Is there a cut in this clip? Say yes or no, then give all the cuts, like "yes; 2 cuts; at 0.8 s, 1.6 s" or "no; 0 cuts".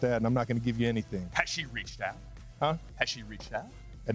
no; 0 cuts